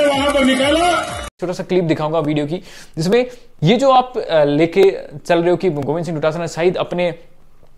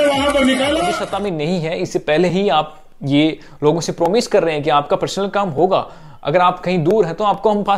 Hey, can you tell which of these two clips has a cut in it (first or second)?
second